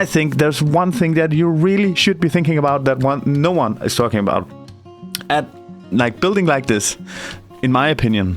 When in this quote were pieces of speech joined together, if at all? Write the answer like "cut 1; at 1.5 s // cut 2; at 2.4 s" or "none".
none